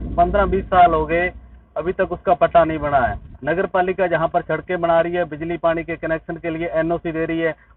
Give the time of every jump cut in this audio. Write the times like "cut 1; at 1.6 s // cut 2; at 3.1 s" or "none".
cut 1; at 3.3 s

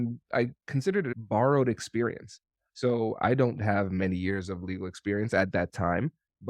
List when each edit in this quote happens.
cut 1; at 1.2 s

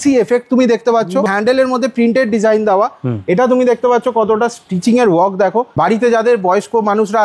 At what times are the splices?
cut 1; at 1.3 s // cut 2; at 5.7 s

